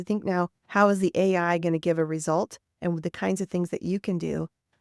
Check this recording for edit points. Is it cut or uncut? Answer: uncut